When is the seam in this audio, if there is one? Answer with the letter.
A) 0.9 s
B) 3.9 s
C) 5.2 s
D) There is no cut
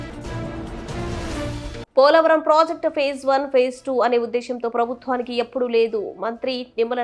A